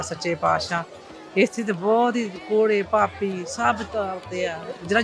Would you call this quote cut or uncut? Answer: uncut